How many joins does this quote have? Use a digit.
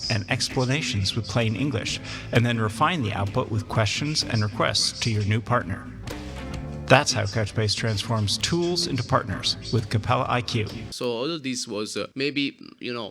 2